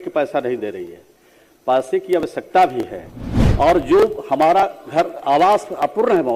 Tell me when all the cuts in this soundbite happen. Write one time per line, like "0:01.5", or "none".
0:03.4